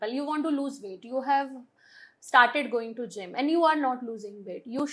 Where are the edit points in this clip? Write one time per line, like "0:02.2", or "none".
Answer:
none

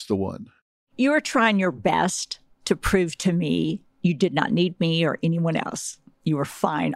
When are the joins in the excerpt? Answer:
none

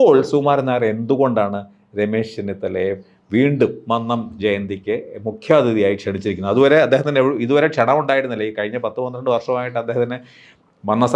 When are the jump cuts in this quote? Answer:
none

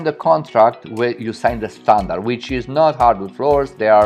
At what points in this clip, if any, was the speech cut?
none

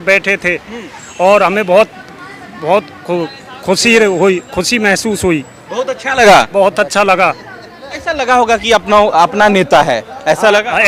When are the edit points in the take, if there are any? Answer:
none

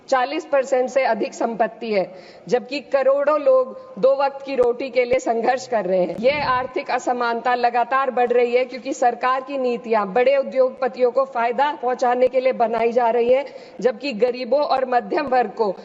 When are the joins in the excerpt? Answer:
0:06.1

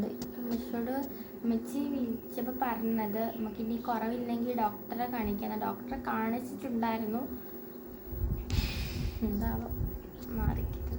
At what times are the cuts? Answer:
none

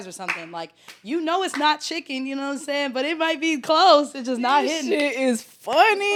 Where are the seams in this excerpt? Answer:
none

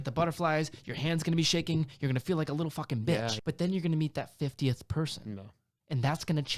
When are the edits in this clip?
0:03.4

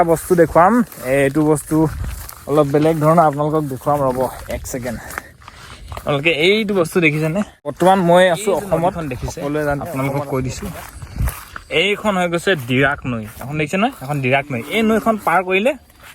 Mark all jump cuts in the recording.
0:07.8
0:09.9

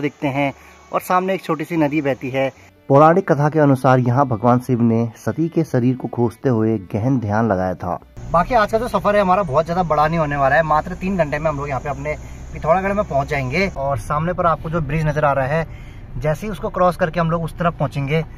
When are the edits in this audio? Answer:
0:02.7
0:08.1
0:13.8

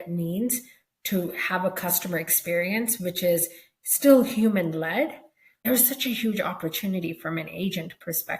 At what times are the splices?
0:05.6

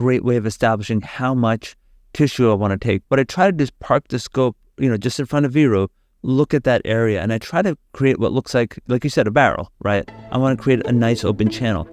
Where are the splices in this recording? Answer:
none

